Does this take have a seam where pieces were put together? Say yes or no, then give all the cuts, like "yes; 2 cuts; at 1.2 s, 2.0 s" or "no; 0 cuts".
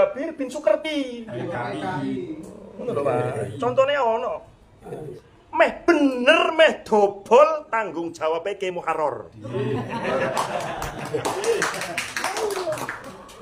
yes; 1 cut; at 5.2 s